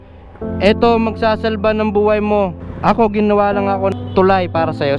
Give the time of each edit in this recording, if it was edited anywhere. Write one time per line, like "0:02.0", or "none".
0:02.6
0:03.9